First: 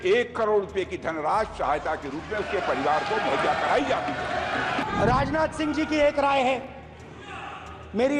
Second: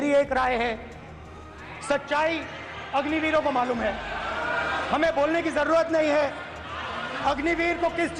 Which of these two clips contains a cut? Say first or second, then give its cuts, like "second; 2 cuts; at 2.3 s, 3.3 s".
first; 1 cut; at 4.8 s